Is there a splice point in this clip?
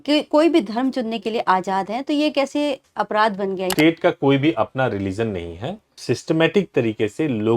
yes; 2 cuts; at 3.7 s, 6.0 s

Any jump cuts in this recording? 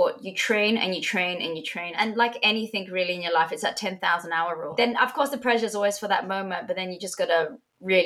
yes; 2 cuts; at 1.9 s, 4.7 s

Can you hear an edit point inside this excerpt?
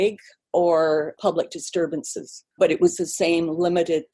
yes; 1 cut; at 2.6 s

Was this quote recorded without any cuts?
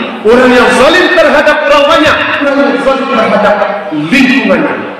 no; 1 cut; at 2.5 s

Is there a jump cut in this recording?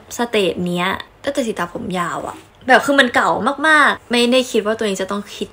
yes; 2 cuts; at 1.0 s, 4.0 s

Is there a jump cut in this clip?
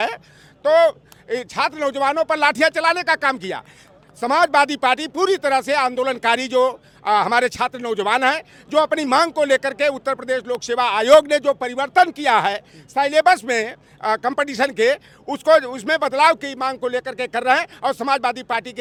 no; 0 cuts

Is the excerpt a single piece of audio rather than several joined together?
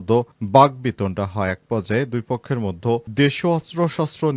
yes; 0 cuts

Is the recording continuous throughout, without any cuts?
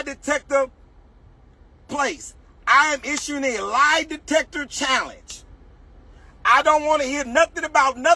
yes; 0 cuts

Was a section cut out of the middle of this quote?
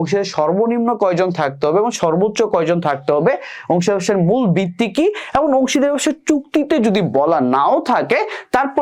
no; 0 cuts

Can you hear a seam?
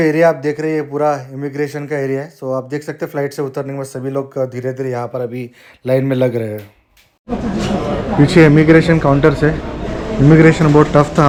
no; 0 cuts

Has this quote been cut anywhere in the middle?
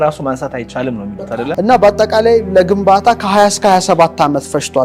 yes; 1 cut; at 1.4 s

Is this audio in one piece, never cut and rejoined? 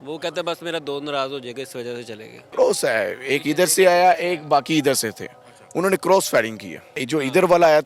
no; 2 cuts; at 2.4 s, 7.0 s

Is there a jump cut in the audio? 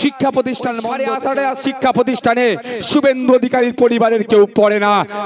yes; 1 cut; at 0.9 s

